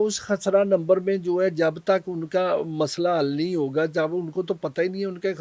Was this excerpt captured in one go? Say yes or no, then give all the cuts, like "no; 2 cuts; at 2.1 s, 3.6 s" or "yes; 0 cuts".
yes; 0 cuts